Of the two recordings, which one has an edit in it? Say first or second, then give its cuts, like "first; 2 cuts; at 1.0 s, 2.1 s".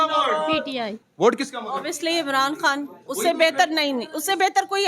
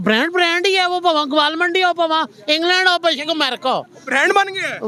first; 1 cut; at 1.0 s